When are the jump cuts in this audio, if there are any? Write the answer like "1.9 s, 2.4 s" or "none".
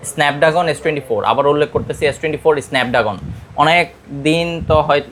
none